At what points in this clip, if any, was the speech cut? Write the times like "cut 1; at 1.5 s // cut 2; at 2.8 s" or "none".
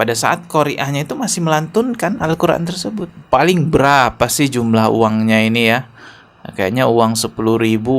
cut 1; at 3.1 s